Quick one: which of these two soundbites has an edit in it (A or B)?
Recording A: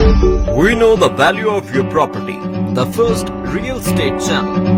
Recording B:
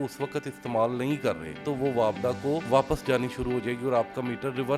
B